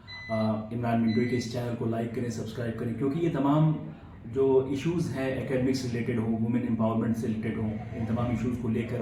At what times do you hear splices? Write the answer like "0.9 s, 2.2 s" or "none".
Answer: none